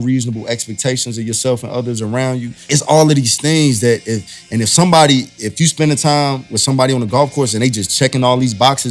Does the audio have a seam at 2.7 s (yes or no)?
yes